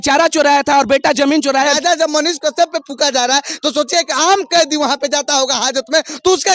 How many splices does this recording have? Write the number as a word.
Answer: one